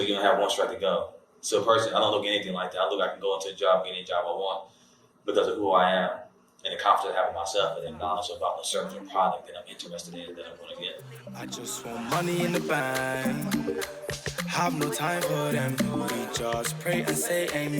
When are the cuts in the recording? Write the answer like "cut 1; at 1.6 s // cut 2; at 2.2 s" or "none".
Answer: cut 1; at 11.4 s